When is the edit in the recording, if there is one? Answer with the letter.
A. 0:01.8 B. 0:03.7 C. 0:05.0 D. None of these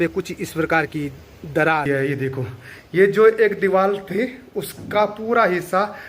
A